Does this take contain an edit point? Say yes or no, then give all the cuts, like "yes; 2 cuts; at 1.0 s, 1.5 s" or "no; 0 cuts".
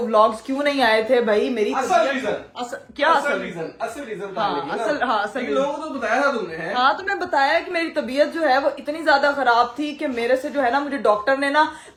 no; 0 cuts